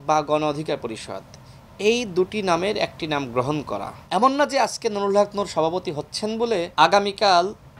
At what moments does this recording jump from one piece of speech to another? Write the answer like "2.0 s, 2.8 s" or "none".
4.0 s

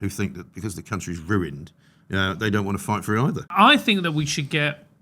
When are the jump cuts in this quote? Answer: 3.5 s

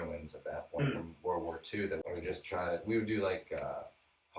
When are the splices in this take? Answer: 2.0 s

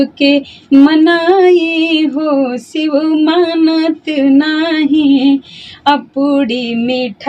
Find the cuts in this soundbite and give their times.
none

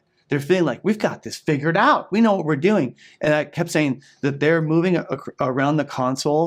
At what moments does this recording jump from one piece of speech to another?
none

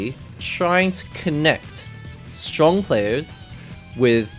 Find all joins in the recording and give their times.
none

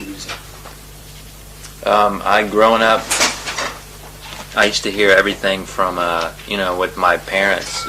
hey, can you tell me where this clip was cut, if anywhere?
4.2 s

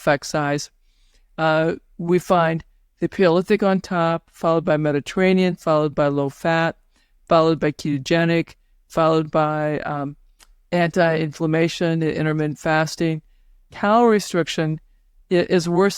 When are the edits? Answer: none

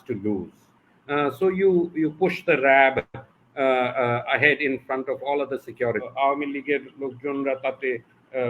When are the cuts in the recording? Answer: 6.1 s

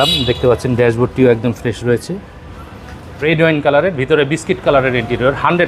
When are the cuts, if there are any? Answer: 3.1 s

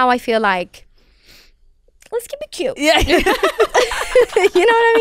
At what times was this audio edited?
none

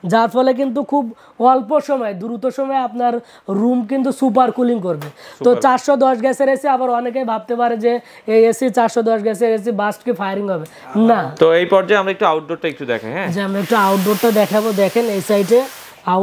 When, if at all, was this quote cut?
none

